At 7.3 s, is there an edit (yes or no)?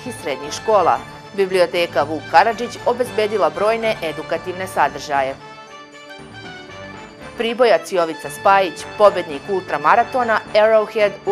yes